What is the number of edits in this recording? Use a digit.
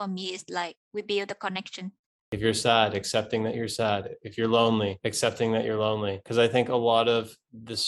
1